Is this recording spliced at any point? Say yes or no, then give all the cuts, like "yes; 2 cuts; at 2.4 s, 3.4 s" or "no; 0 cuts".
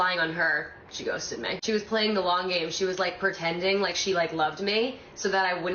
no; 0 cuts